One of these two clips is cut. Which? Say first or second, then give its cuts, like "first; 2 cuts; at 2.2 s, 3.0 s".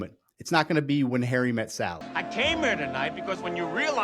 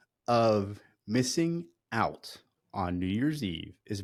first; 1 cut; at 2.0 s